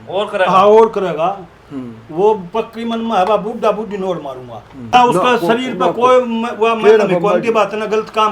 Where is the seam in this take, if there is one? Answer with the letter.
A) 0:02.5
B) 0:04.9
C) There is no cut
B